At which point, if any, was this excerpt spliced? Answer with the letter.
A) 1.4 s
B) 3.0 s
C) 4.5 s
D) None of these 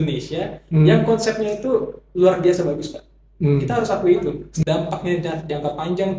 C